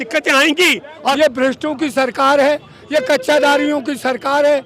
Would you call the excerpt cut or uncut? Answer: cut